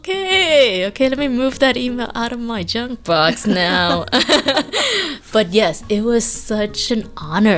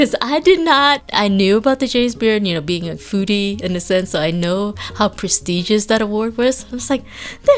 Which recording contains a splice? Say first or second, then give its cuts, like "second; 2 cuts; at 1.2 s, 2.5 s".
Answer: second; 1 cut; at 1.1 s